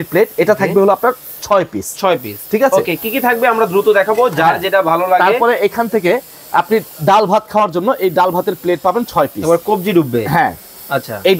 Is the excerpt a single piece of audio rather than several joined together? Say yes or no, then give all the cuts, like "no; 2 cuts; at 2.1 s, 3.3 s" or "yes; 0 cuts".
yes; 0 cuts